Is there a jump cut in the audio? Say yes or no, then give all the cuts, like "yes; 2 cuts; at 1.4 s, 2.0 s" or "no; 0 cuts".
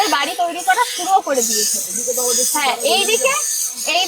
no; 0 cuts